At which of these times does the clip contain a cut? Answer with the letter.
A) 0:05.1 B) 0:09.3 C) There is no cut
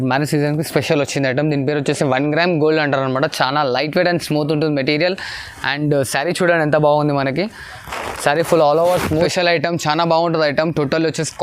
B